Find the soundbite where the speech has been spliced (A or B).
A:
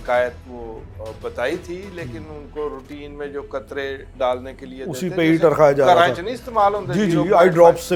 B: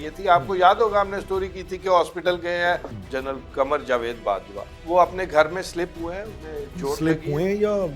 B